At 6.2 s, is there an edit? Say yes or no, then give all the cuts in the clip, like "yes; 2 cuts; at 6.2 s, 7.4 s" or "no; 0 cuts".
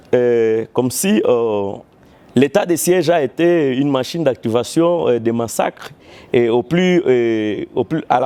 no; 0 cuts